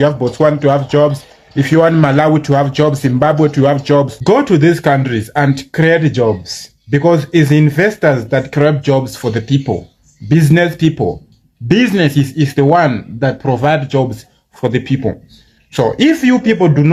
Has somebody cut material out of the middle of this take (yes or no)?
no